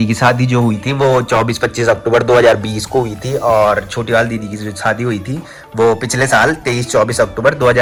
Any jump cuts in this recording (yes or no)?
no